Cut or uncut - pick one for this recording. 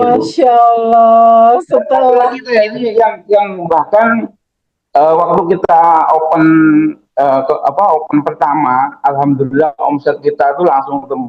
uncut